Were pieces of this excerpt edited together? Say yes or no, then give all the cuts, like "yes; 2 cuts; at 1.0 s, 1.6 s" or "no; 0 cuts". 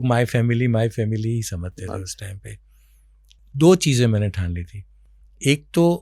yes; 1 cut; at 3.2 s